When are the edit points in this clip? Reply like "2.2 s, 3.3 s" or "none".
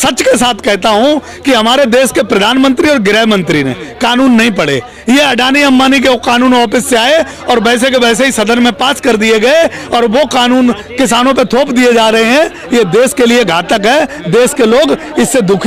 none